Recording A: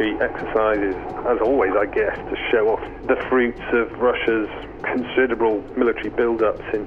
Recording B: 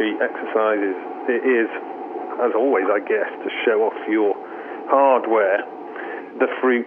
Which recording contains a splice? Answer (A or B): A